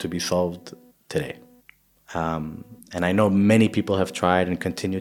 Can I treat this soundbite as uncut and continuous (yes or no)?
yes